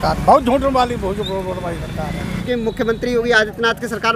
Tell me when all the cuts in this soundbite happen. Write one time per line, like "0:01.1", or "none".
0:02.4